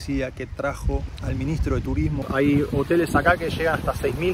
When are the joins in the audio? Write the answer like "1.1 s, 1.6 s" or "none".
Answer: 2.2 s